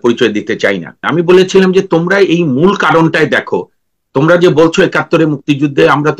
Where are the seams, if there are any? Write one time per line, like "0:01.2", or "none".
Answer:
0:01.0